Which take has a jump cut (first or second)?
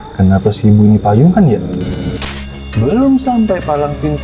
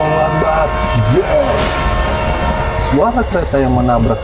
first